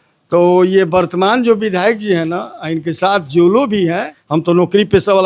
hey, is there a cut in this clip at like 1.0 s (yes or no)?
no